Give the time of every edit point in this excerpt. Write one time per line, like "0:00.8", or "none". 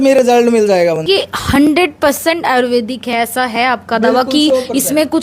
0:01.0

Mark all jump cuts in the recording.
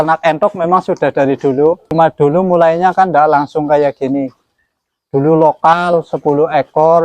0:01.9

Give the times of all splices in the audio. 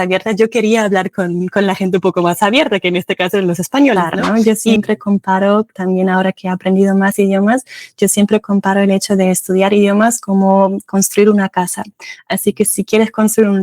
0:04.1

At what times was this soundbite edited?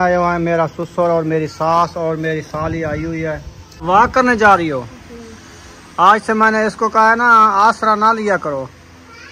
0:03.8

